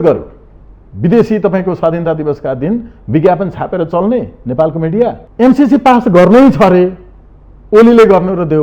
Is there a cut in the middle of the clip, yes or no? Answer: yes